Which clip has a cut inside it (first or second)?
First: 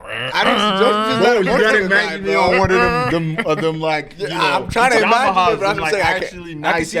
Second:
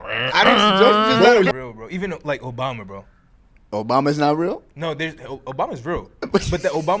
second